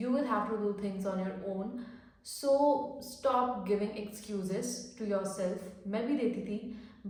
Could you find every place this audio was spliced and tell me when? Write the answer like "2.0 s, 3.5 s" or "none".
none

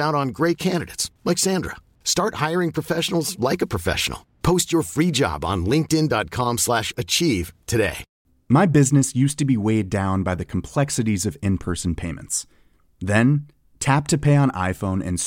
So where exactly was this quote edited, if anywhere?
8.1 s

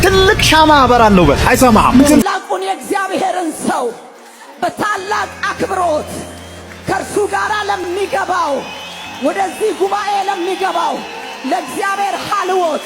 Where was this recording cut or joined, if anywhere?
2.2 s

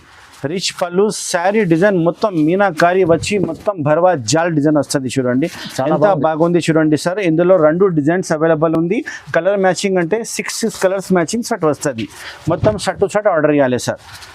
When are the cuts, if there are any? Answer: none

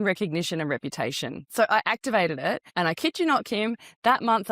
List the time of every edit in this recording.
1.4 s, 2.7 s

